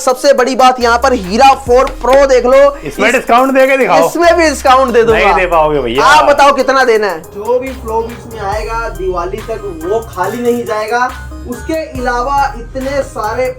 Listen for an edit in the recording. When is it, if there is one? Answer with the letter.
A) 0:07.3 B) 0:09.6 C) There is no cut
A